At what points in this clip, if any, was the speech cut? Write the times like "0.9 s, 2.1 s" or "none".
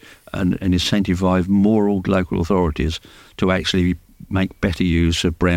none